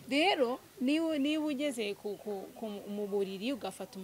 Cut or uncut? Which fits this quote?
uncut